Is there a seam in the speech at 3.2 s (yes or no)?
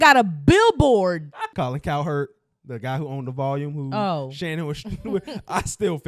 no